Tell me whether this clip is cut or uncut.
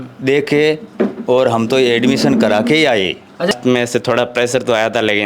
cut